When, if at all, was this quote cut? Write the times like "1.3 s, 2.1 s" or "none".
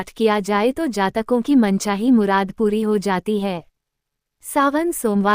4.3 s